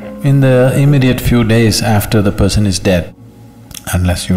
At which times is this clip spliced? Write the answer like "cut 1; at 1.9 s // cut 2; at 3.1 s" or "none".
cut 1; at 3.1 s